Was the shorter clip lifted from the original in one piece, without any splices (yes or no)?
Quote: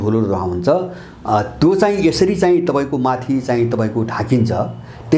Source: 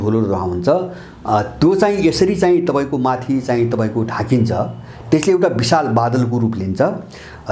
yes